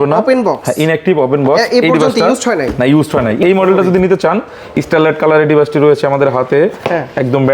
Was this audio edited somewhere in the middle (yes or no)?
no